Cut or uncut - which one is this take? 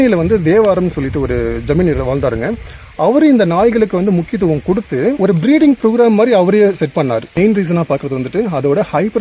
cut